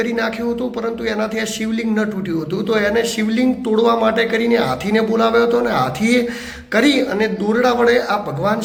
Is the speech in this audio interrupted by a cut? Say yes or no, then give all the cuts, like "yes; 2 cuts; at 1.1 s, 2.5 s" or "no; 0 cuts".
no; 0 cuts